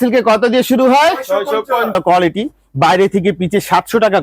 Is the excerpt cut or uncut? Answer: cut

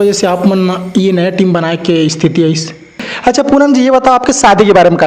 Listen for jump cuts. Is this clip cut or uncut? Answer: cut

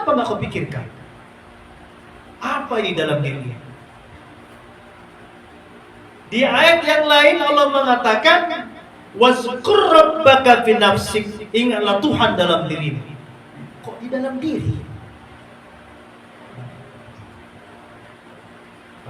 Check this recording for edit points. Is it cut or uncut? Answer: uncut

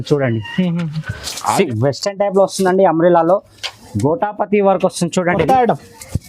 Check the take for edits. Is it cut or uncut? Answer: cut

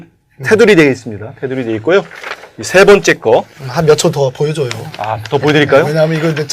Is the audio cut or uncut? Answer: cut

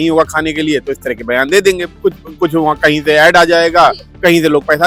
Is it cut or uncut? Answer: uncut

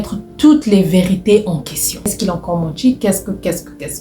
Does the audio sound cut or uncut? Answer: cut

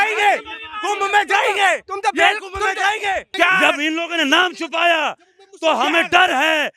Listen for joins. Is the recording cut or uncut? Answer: cut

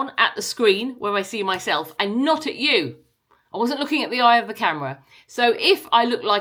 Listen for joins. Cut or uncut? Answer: uncut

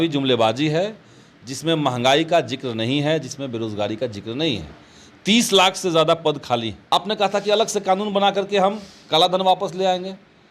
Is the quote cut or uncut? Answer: cut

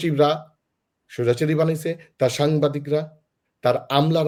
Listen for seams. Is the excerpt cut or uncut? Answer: uncut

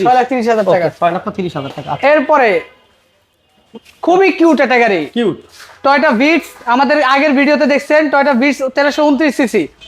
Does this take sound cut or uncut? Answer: uncut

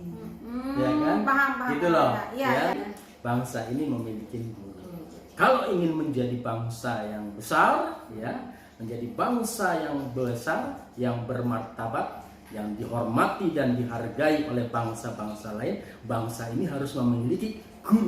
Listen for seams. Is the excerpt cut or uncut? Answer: cut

